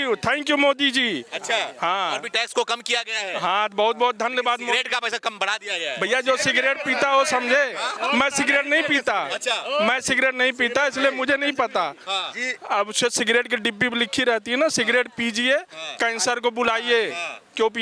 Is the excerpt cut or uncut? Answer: uncut